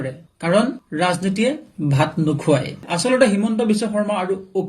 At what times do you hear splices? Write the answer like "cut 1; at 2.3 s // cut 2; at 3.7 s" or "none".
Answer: cut 1; at 2.8 s